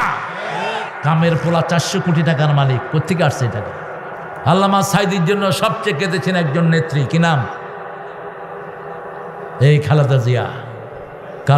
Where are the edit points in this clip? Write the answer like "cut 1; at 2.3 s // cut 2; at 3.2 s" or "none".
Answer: cut 1; at 4.3 s